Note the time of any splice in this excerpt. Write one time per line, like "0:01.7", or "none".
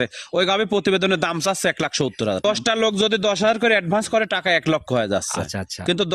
0:02.4